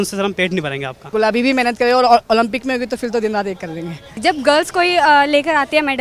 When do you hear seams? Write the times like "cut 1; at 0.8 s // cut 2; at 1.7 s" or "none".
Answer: cut 1; at 1.1 s // cut 2; at 4.2 s